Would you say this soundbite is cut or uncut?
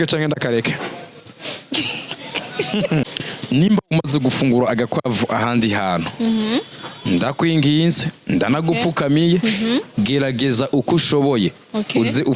cut